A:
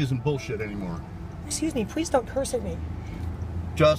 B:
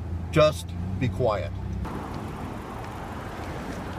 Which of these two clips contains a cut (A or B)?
B